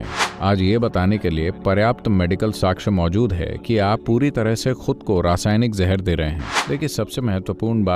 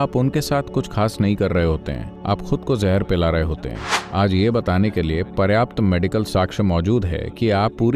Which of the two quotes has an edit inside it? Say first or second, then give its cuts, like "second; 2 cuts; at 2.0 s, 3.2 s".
first; 1 cut; at 6.4 s